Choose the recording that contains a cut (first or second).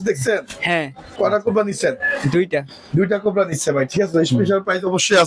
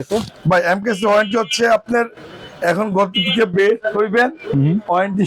first